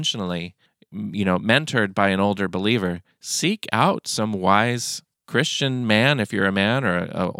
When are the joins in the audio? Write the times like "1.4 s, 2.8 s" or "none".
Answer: none